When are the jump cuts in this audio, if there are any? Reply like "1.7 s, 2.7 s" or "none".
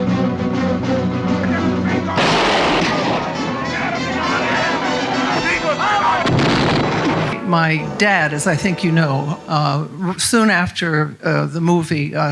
7.4 s